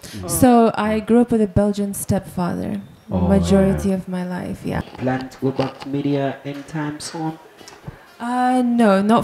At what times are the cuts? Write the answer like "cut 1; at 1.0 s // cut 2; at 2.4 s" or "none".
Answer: cut 1; at 4.8 s